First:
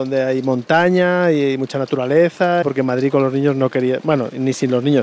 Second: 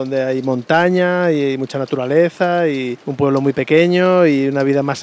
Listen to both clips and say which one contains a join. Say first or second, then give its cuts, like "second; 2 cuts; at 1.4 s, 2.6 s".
first; 1 cut; at 2.6 s